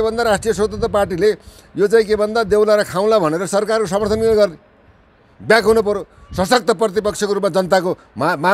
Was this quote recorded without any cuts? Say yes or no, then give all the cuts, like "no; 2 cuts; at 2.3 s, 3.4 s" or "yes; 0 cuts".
yes; 0 cuts